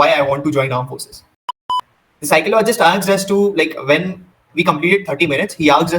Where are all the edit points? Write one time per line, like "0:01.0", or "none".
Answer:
0:01.6